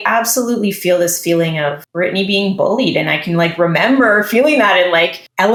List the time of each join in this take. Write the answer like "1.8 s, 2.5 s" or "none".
none